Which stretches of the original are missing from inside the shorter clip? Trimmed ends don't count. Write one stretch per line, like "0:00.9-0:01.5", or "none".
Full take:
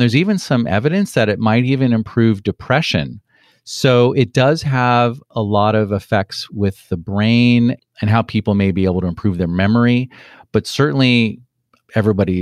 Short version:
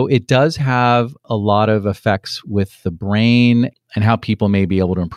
none